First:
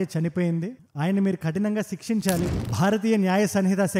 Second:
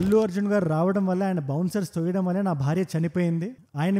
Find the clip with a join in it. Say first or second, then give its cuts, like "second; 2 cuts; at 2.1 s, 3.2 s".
first; 1 cut; at 2.5 s